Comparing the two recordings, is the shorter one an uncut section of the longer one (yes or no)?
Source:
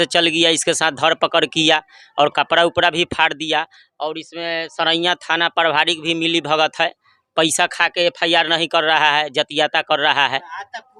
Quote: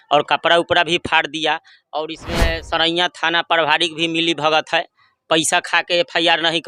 yes